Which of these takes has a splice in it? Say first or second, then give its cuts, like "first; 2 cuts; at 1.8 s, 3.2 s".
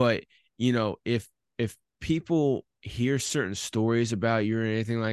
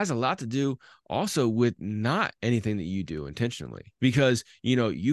second; 1 cut; at 3.8 s